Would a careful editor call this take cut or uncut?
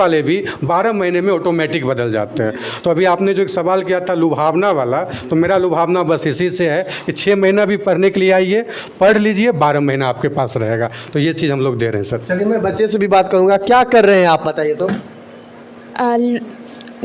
uncut